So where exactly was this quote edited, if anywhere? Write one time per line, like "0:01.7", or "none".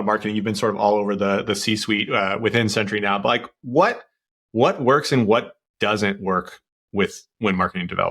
none